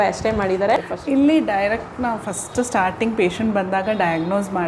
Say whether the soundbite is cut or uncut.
cut